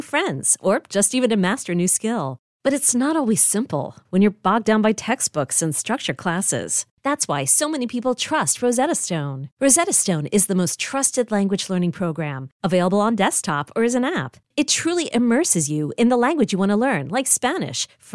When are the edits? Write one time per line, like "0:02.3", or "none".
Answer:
none